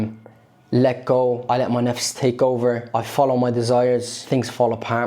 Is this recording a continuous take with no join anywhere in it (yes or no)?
no